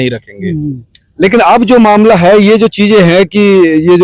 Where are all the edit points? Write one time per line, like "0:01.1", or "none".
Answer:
none